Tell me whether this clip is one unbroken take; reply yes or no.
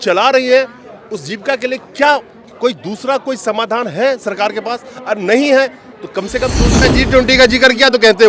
no